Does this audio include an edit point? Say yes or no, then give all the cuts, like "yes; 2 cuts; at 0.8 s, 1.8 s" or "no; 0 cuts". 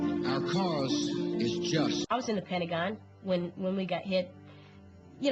no; 0 cuts